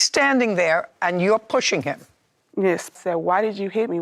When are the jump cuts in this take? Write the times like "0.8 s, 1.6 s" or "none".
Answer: 2.9 s